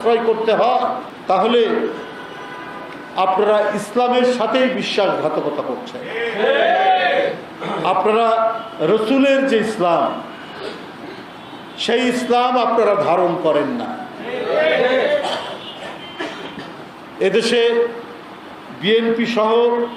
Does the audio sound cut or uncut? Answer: uncut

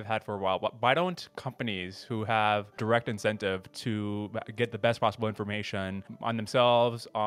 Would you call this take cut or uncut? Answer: cut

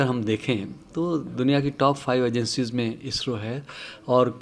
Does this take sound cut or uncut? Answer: uncut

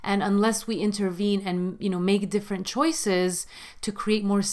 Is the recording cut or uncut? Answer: uncut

